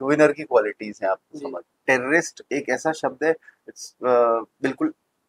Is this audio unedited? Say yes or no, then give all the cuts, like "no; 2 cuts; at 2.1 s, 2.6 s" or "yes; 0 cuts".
no; 1 cut; at 1.7 s